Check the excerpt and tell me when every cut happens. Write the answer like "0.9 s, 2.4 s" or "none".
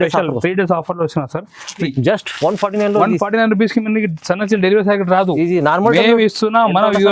1.9 s